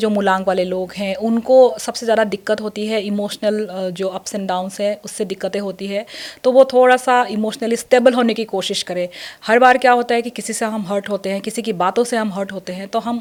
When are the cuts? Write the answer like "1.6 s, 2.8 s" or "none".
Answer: none